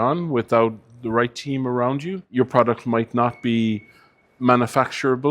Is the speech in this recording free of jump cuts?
no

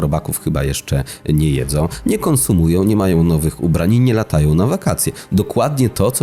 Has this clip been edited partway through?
no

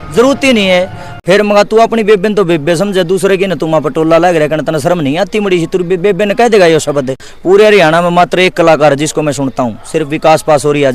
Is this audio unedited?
no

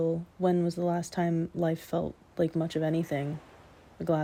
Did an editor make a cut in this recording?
no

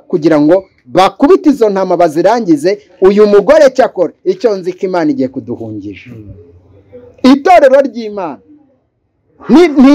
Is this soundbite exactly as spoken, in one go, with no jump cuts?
yes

